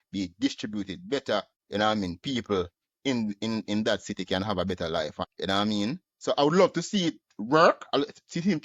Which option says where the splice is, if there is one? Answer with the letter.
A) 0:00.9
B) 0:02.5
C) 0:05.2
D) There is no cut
C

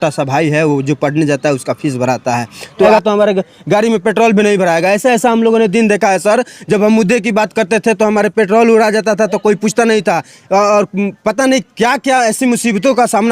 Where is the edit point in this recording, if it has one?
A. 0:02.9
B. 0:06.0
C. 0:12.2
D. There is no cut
A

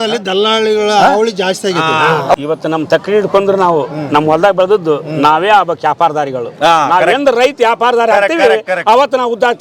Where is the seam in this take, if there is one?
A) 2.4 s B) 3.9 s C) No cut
A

